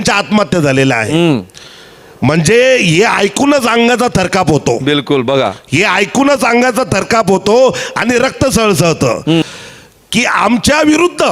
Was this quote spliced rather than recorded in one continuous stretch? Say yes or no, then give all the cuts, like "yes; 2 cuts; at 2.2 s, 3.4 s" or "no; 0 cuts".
yes; 1 cut; at 9.4 s